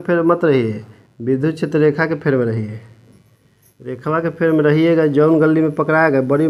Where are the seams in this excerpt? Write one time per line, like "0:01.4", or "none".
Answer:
none